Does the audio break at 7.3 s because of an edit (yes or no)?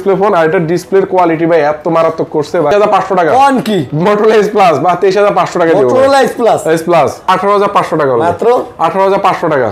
yes